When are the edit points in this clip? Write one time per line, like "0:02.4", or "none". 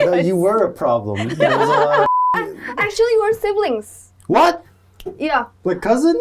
0:02.3
0:04.7